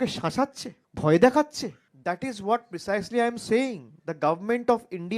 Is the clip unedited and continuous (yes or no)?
no